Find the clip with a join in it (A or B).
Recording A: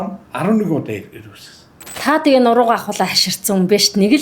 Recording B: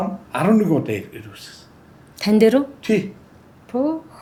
A